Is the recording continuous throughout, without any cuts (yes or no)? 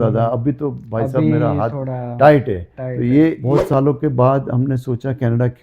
no